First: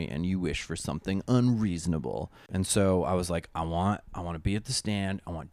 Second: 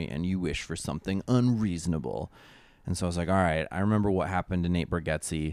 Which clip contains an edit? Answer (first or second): first